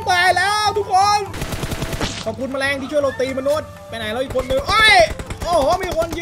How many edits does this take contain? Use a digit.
1